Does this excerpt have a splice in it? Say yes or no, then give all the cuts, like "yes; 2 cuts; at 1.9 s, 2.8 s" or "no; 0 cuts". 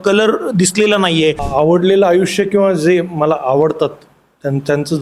yes; 1 cut; at 1.4 s